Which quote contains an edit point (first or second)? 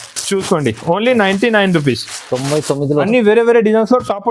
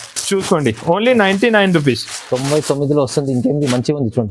first